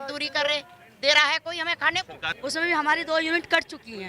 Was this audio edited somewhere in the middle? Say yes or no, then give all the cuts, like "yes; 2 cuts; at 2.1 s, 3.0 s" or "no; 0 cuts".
yes; 1 cut; at 2.3 s